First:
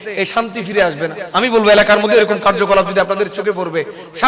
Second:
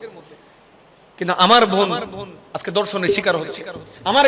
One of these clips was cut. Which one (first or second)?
first